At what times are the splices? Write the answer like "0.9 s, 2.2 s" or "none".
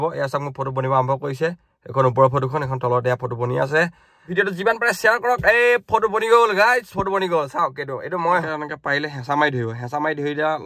4.3 s, 8.5 s